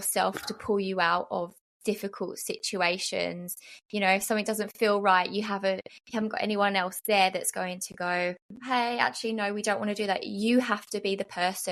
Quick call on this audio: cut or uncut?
uncut